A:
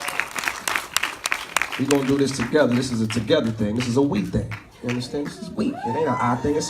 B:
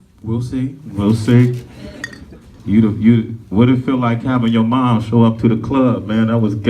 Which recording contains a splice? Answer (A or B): B